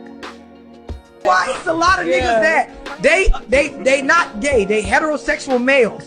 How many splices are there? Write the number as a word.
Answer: one